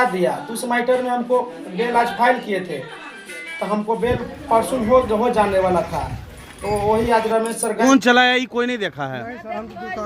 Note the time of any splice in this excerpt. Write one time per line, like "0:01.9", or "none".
0:07.8